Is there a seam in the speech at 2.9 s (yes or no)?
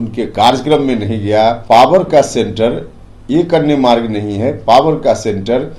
no